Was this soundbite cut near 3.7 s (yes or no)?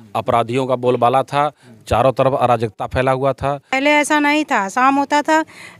yes